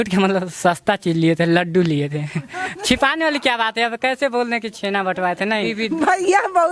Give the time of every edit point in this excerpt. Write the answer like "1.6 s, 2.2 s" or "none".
5.7 s

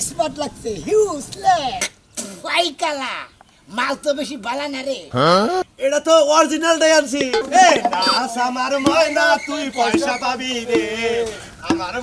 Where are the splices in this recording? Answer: 1.8 s, 7.4 s

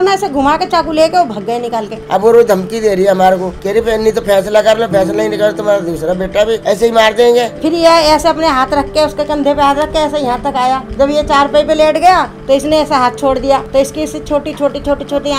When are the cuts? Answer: 2.0 s, 7.5 s

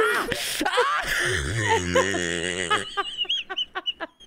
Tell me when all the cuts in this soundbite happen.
none

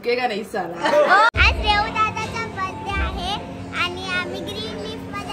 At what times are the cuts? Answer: 1.3 s

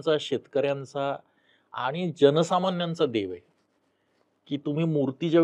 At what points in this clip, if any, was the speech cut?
none

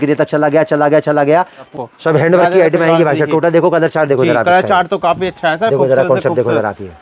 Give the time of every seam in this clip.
1.6 s

